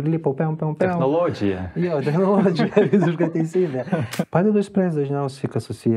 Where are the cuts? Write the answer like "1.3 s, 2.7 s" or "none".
4.2 s